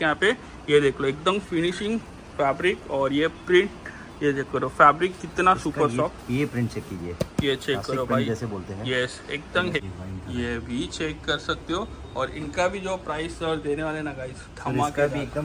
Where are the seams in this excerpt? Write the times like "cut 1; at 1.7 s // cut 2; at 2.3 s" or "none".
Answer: cut 1; at 9.8 s